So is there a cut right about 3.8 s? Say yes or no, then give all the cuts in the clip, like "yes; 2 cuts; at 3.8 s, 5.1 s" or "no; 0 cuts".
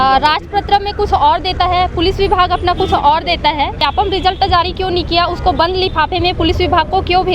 yes; 1 cut; at 3.8 s